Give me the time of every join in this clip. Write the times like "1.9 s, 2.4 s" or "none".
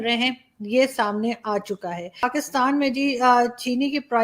2.2 s